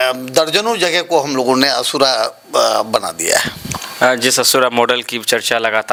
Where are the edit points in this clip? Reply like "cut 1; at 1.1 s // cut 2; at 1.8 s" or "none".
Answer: none